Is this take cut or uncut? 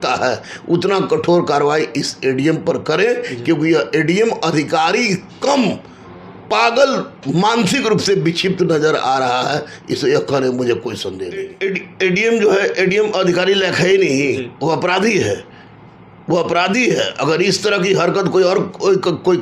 cut